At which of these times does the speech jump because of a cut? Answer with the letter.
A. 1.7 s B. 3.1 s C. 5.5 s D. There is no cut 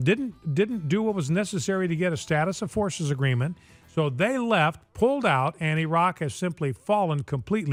D